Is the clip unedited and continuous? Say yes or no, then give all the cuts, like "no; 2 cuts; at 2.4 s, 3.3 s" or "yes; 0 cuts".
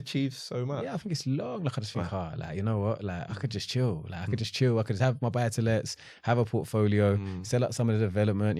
yes; 0 cuts